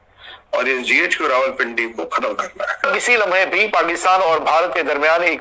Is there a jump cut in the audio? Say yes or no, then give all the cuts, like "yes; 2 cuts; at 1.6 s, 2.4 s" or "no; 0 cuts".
yes; 1 cut; at 2.9 s